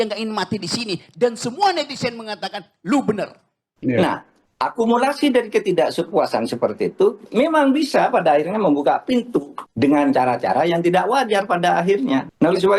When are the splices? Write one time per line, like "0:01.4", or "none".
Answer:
0:03.7